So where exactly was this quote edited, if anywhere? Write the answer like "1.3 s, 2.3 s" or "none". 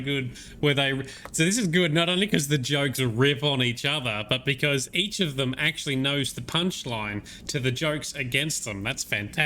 none